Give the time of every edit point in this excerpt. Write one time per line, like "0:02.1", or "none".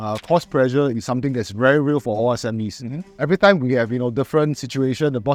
none